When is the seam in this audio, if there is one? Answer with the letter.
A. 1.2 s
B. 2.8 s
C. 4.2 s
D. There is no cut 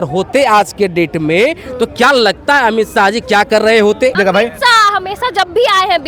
C